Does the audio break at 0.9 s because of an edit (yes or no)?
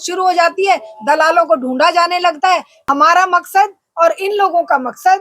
no